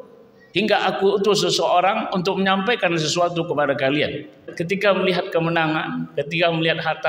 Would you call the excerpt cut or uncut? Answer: cut